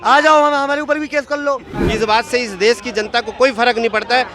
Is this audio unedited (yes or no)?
no